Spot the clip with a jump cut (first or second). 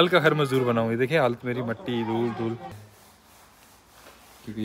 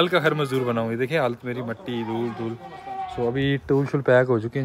first